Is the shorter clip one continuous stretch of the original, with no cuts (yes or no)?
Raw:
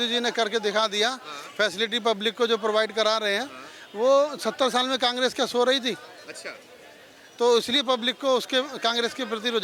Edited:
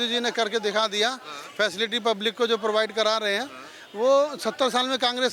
yes